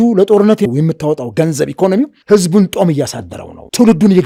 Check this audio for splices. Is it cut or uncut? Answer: uncut